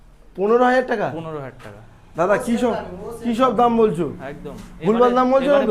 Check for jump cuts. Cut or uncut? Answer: uncut